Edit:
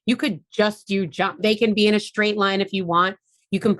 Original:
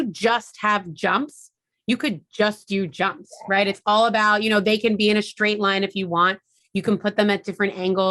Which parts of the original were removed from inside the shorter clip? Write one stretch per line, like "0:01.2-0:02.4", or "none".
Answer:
0:03.2-0:04.6